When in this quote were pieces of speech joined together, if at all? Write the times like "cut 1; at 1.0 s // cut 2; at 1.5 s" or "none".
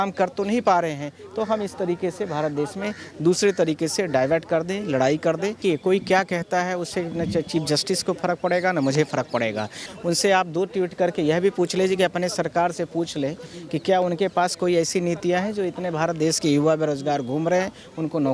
cut 1; at 5.6 s // cut 2; at 9.8 s